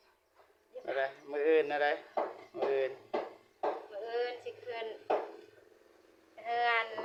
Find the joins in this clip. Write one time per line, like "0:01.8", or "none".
none